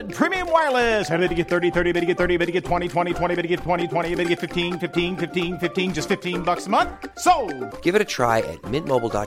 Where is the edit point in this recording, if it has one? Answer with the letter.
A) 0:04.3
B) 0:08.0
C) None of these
C